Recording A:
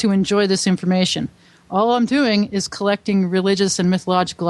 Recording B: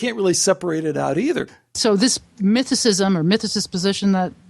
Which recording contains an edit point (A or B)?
B